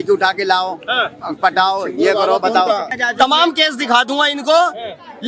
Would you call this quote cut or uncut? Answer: cut